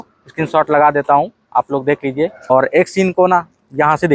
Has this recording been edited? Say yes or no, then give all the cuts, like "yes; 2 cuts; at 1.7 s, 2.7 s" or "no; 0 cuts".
yes; 1 cut; at 2.5 s